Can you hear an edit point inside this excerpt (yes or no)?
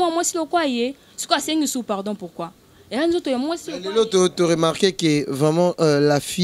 no